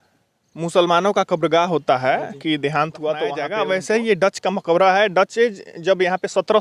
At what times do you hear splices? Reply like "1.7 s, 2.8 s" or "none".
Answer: 3.4 s

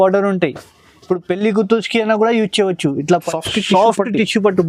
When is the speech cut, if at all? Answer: 3.1 s

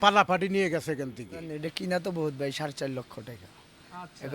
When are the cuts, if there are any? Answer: 1.5 s

